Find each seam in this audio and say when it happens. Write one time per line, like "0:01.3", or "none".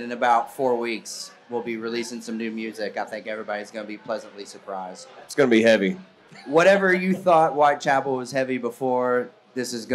0:05.3
0:06.3